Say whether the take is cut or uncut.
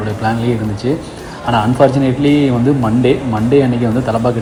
uncut